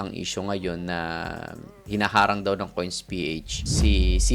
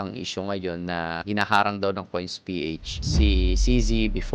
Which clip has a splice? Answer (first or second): second